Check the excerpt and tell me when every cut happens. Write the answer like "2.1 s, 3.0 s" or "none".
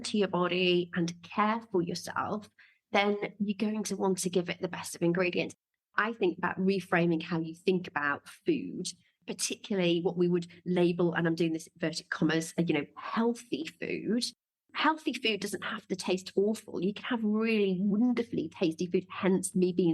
5.6 s, 9.1 s

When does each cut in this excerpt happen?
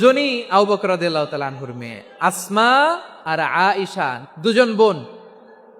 3.1 s, 4.2 s

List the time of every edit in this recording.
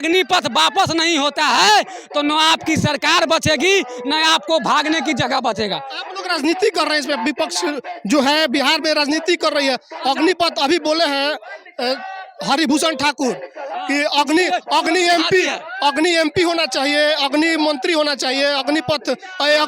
none

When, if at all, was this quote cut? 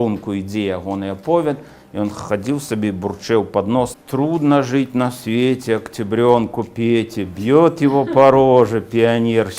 4.0 s

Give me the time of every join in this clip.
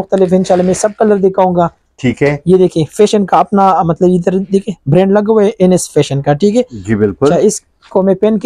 none

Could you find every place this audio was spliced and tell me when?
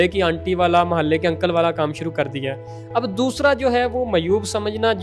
none

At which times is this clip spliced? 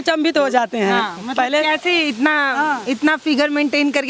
none

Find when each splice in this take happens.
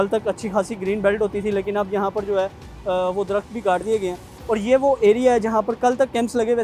none

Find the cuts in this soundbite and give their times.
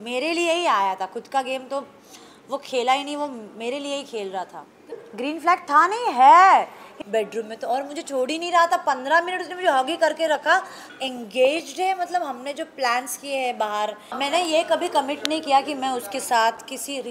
5.0 s, 6.8 s, 10.8 s, 14.1 s

